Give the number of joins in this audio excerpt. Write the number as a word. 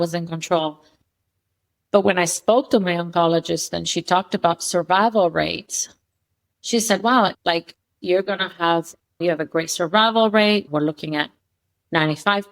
three